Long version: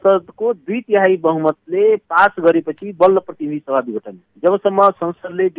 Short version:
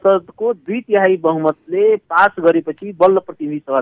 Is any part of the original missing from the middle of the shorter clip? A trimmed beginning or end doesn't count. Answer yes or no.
no